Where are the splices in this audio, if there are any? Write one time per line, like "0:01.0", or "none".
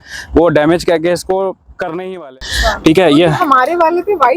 0:02.2